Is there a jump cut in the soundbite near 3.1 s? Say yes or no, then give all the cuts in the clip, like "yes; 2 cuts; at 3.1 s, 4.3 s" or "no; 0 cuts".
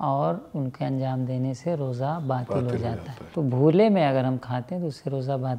yes; 1 cut; at 3.1 s